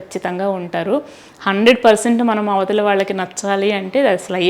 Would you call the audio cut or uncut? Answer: uncut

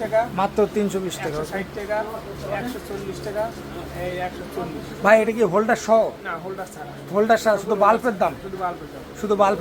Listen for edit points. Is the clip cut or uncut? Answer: uncut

